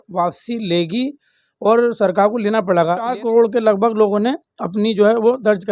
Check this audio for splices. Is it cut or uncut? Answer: cut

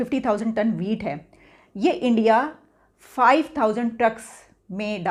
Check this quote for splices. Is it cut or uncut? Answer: uncut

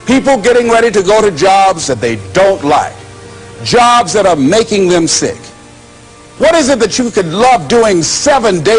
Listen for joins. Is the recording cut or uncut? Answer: cut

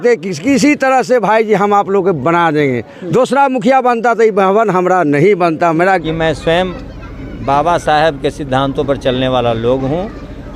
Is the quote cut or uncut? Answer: cut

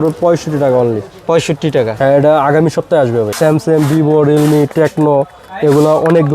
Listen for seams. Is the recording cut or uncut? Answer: cut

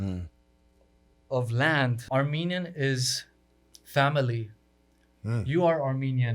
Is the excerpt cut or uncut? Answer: cut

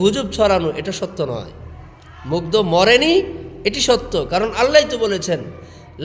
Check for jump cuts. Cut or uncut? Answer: uncut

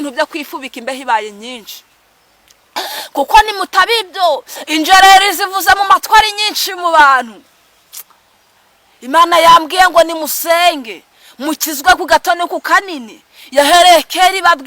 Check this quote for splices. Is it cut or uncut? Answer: uncut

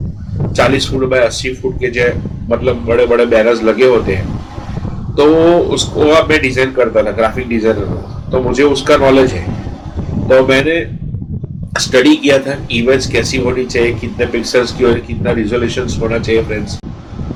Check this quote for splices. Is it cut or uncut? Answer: uncut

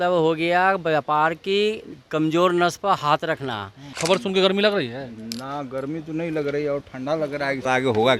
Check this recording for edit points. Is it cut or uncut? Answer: cut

